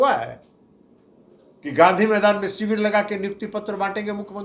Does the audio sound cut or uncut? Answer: uncut